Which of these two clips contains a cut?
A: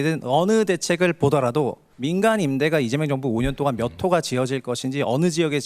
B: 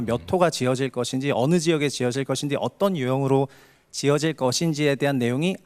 A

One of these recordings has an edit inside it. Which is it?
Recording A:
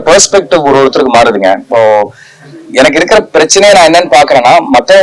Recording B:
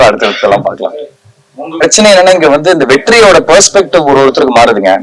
B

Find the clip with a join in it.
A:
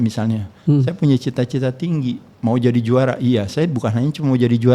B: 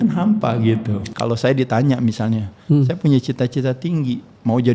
B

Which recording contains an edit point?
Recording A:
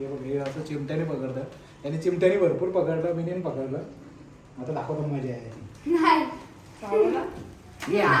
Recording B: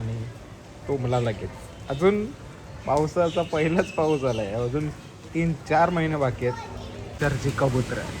B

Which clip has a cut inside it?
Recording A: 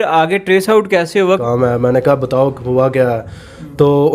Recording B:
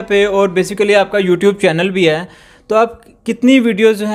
A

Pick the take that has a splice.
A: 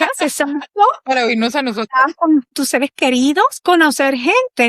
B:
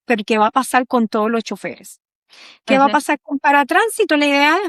A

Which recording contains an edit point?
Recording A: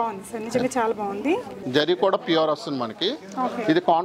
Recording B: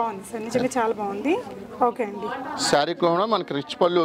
A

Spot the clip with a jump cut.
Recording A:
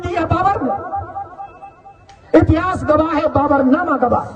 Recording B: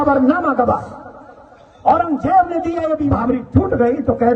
B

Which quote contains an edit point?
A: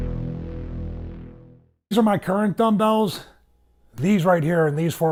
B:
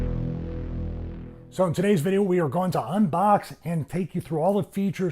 B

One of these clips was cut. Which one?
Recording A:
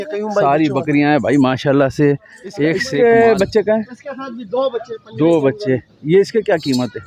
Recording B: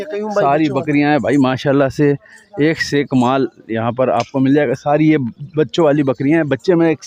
A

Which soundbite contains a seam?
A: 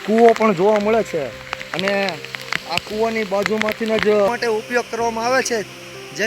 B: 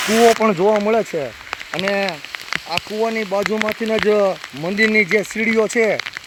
A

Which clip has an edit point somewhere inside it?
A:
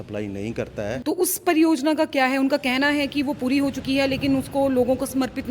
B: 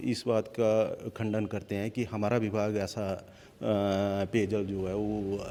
A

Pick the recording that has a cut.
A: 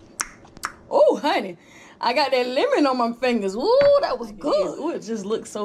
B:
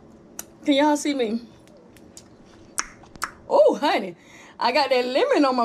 A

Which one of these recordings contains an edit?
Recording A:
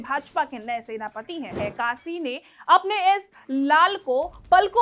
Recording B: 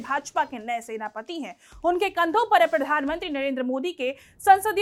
A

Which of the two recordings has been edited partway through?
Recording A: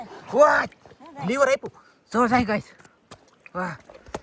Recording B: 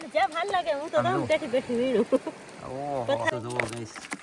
B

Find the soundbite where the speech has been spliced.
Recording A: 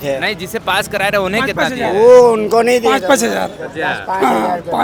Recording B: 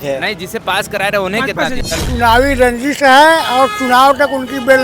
B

